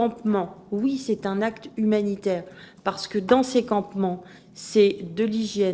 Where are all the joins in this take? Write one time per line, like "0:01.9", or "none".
none